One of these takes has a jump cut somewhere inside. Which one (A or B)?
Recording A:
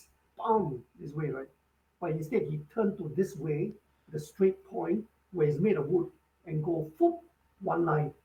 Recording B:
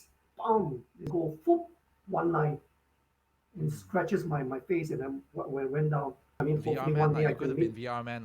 B